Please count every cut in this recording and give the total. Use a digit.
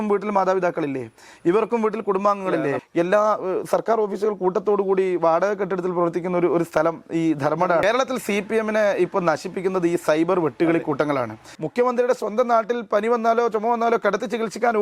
3